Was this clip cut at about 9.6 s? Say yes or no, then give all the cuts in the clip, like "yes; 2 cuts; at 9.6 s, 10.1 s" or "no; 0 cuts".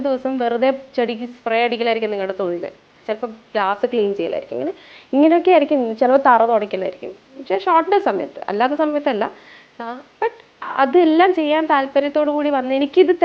no; 1 cut; at 3.0 s